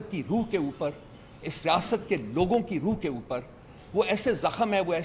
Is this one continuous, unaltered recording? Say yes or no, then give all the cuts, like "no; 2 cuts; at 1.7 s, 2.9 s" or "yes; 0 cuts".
yes; 0 cuts